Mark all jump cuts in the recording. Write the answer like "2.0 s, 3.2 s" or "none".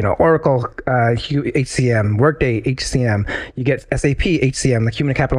none